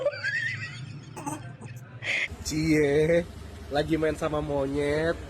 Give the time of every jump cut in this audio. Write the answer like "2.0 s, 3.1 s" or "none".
2.2 s